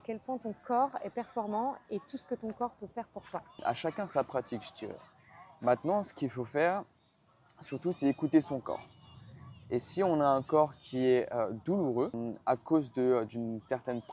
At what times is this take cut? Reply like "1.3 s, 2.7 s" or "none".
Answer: 3.6 s, 12.3 s